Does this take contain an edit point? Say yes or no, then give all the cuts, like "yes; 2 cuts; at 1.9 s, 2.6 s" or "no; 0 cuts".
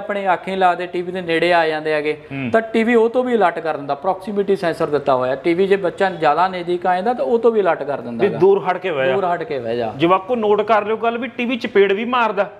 no; 0 cuts